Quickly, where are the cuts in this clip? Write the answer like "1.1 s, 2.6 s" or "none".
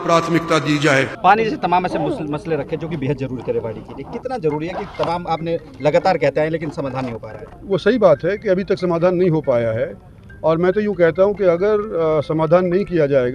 1.1 s

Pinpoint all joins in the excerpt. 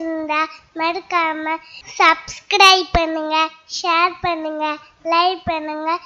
none

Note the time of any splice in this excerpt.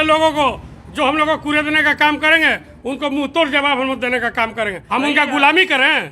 4.8 s

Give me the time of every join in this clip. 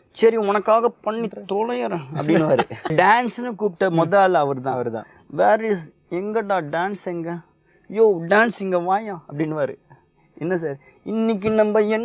2.9 s

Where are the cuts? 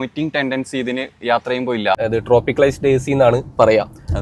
2.0 s

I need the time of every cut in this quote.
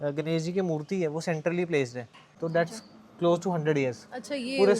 2.3 s

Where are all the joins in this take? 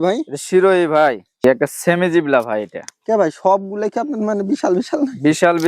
1.4 s

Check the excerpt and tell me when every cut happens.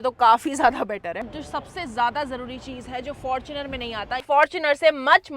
1.3 s, 4.2 s

